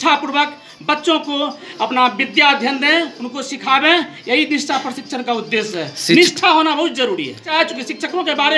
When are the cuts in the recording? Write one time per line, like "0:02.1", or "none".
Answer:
0:07.5

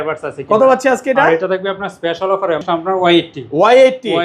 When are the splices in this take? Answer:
0:02.6

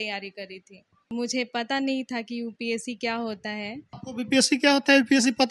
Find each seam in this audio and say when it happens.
0:01.1
0:04.0

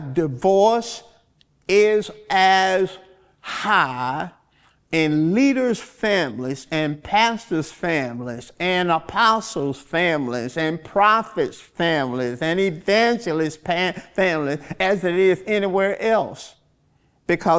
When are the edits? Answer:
none

